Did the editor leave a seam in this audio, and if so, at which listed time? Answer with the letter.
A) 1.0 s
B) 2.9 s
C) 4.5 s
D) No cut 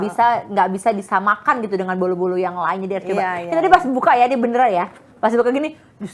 D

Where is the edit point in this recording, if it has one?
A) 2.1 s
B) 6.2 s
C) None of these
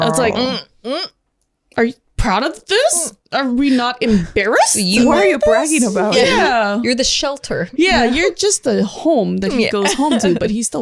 C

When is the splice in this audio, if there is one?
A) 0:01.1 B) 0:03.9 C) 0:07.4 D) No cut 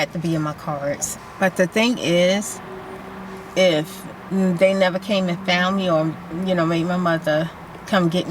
A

